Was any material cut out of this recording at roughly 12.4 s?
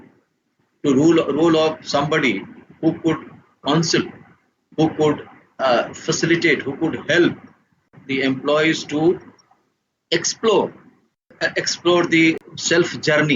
yes; 3 cuts; at 7.5 s, 11.3 s, 12.4 s

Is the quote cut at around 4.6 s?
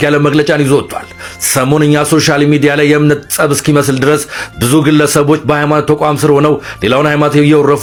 no; 0 cuts

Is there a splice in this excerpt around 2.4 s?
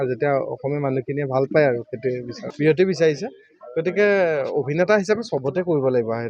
yes; 1 cut; at 2.4 s

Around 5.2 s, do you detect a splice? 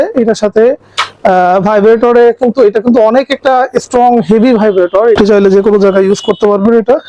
yes; 1 cut; at 5.2 s

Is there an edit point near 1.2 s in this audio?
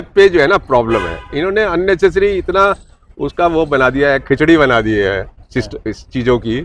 no; 0 cuts

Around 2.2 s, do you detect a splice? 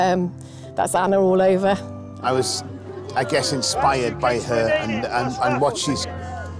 yes; 1 cut; at 2.2 s

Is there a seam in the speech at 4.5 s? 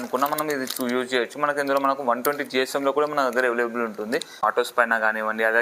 yes; 1 cut; at 4.5 s

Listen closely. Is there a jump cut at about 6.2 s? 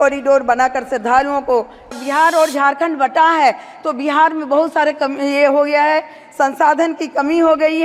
no; 1 cut; at 1.9 s

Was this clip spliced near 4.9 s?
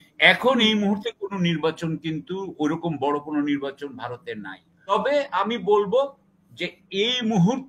yes; 1 cut; at 4.9 s

